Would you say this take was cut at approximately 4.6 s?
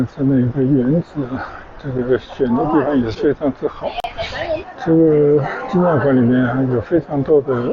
yes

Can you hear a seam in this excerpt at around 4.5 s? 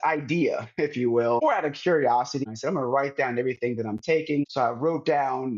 yes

